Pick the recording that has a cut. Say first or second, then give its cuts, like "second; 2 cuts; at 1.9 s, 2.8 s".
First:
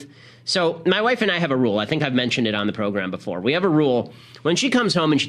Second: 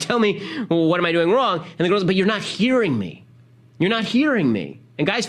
second; 1 cut; at 1.7 s